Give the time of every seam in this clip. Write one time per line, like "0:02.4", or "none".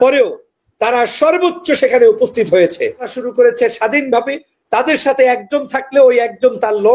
0:03.2

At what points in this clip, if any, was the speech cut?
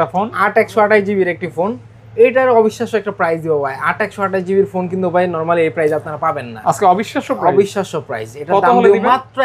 none

